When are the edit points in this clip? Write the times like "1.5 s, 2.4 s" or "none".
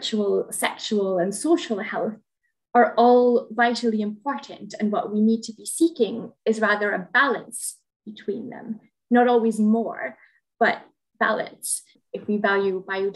12.0 s